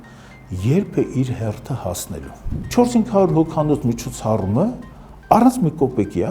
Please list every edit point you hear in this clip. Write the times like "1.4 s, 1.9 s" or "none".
2.5 s